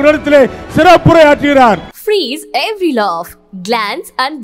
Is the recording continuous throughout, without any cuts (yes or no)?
no